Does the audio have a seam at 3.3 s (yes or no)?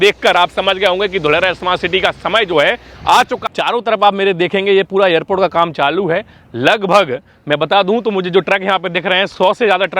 yes